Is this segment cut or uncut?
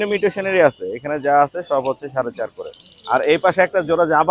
uncut